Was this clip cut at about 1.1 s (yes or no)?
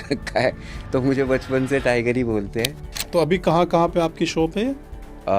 no